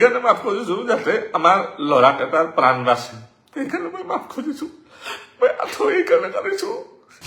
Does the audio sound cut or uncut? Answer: uncut